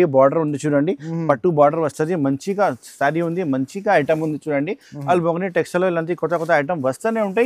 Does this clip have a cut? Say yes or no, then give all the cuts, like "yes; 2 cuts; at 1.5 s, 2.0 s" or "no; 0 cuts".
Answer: no; 0 cuts